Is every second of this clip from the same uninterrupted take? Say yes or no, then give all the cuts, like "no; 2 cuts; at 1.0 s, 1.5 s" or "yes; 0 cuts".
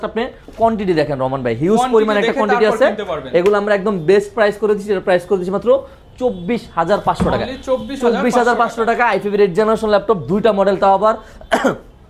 yes; 0 cuts